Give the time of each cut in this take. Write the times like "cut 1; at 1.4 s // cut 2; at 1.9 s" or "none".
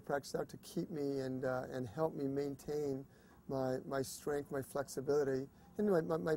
none